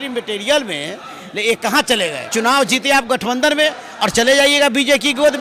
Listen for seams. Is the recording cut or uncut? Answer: cut